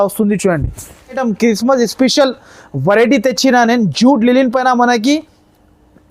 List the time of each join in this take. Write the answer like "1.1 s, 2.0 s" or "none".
1.2 s